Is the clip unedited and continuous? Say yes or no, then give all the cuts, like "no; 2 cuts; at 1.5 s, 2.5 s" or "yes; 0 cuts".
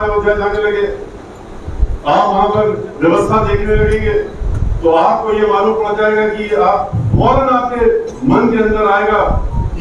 yes; 0 cuts